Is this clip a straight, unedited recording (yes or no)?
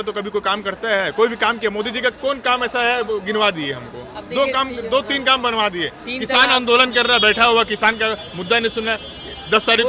yes